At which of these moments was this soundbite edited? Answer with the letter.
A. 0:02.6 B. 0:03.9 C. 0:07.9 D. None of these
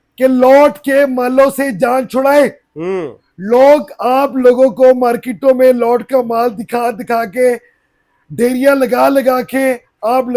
D